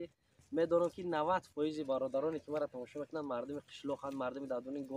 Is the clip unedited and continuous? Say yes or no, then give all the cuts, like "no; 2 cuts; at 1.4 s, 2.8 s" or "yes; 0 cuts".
yes; 0 cuts